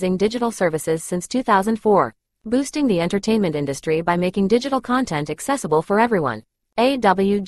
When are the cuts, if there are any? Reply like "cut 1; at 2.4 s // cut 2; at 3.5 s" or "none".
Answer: none